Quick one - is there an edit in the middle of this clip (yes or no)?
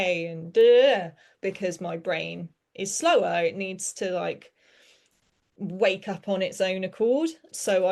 yes